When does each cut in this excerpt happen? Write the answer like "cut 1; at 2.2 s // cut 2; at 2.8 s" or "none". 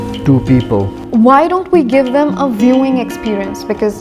cut 1; at 1.0 s